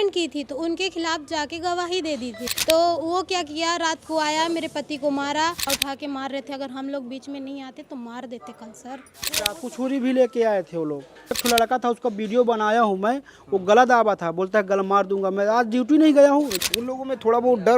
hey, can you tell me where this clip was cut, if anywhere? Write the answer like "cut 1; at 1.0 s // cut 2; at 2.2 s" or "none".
cut 1; at 2.4 s // cut 2; at 5.6 s // cut 3; at 9.2 s // cut 4; at 11.4 s // cut 5; at 16.5 s